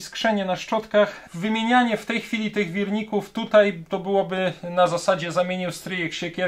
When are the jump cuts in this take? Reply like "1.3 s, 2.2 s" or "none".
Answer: 1.2 s